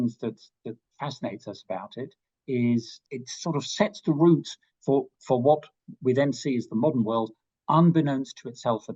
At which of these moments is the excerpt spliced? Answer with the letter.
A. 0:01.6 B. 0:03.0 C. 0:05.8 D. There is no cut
B